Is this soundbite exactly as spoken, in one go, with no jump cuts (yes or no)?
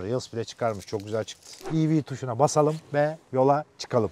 no